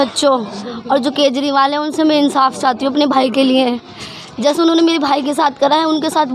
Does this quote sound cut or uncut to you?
uncut